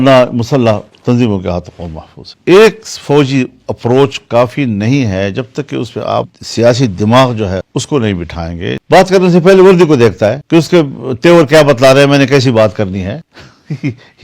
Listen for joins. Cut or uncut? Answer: cut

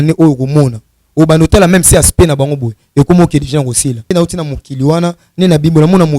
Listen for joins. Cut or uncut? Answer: cut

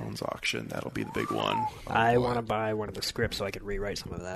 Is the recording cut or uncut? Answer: uncut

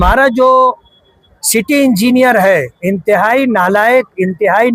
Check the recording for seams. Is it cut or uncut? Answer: uncut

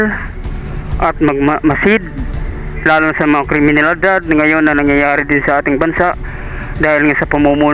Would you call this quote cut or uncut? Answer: uncut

